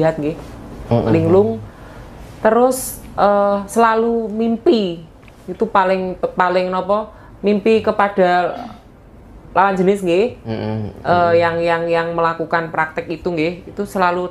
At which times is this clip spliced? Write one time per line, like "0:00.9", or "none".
none